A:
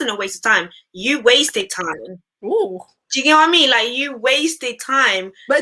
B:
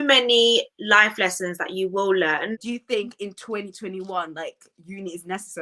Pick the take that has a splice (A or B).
B